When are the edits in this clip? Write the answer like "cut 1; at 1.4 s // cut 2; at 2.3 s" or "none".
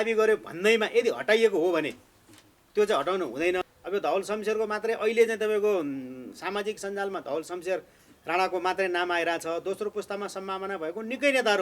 cut 1; at 3.6 s